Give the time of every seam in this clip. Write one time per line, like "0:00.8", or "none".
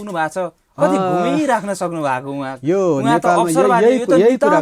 none